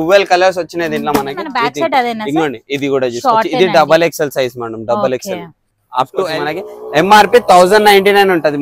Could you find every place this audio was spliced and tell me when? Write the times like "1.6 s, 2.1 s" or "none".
1.6 s, 6.3 s